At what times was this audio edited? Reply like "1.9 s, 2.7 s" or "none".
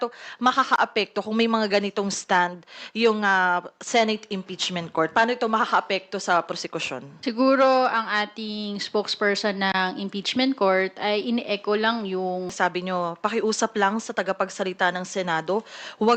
12.5 s

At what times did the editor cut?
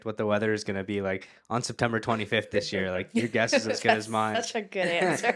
none

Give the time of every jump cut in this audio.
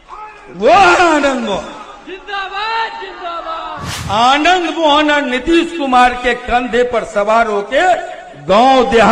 3.7 s

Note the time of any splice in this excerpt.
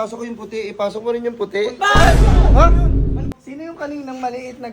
3.4 s

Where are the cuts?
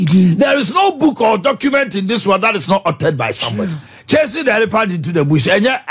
3.9 s

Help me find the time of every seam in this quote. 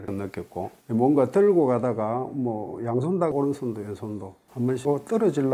none

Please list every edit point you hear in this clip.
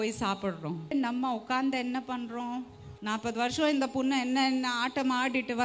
0.9 s, 2.9 s

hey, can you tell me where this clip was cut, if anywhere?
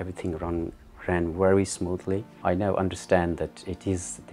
2.3 s

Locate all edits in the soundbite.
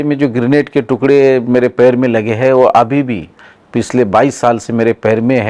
none

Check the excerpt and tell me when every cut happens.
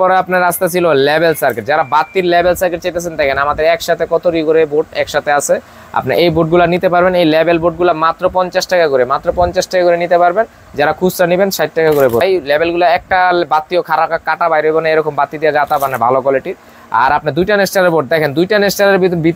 none

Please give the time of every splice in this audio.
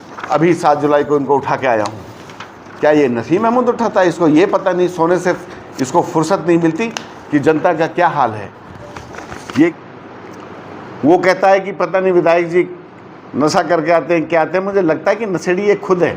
9.8 s

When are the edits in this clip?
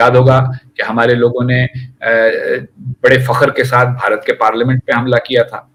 none

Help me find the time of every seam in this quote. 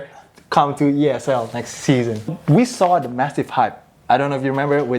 2.3 s

